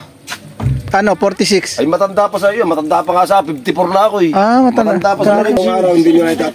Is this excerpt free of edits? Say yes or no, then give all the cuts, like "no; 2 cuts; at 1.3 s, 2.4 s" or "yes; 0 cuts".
no; 1 cut; at 5.6 s